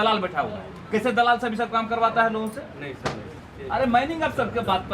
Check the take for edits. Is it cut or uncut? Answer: cut